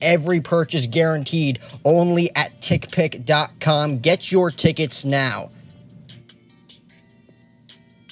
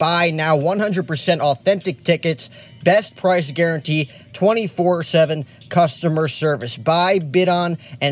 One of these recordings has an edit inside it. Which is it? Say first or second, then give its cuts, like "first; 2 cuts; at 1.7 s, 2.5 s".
first; 1 cut; at 6.1 s